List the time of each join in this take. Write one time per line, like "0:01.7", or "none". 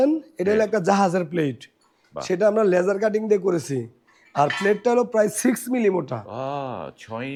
none

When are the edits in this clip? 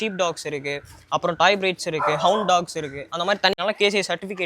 0:03.6

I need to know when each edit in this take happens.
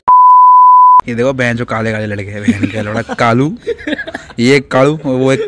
0:00.9

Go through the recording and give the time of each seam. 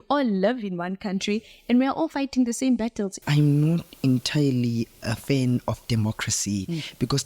0:03.1

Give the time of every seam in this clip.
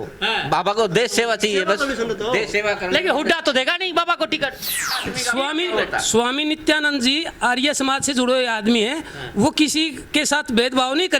0:05.0

